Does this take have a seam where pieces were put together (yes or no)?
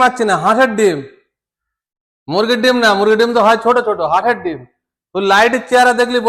no